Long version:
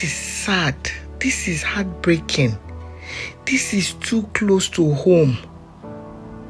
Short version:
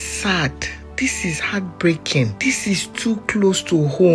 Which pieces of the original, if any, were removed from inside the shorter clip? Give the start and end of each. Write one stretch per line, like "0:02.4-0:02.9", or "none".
0:02.6-0:03.4